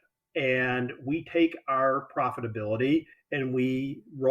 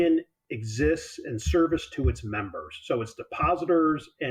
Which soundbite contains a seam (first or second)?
first